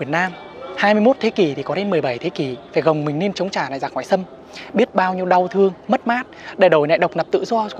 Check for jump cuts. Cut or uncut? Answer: uncut